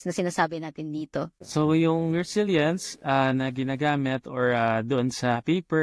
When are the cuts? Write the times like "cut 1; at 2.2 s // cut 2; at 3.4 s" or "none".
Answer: cut 1; at 1.4 s

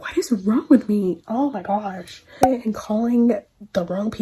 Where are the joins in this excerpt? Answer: cut 1; at 2.3 s

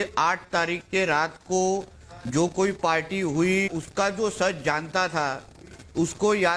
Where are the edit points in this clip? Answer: cut 1; at 3.7 s

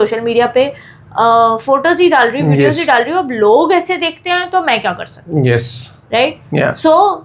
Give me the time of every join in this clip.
none

